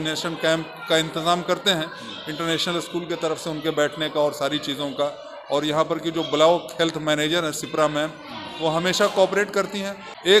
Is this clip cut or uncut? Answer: uncut